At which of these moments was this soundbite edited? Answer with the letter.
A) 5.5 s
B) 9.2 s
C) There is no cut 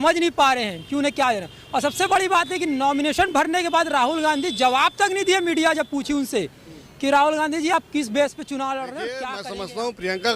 B